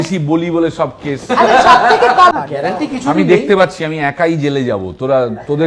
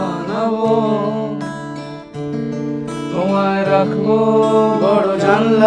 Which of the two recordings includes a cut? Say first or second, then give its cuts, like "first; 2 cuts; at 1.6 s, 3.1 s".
first; 1 cut; at 2.3 s